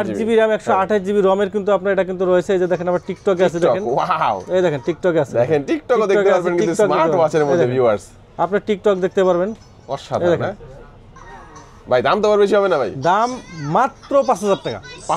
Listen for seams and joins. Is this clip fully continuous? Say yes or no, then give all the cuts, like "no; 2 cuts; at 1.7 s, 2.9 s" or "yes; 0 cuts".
yes; 0 cuts